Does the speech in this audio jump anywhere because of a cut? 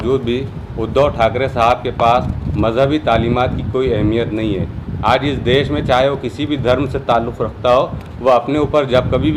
no; 0 cuts

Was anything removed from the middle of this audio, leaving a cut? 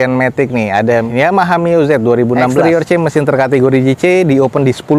yes; 1 cut; at 2.6 s

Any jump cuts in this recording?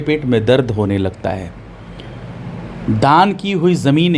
no; 0 cuts

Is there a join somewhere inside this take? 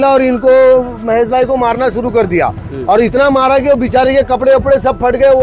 no; 0 cuts

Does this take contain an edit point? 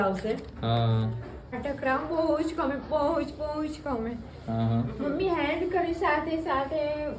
yes; 1 cut; at 1.6 s

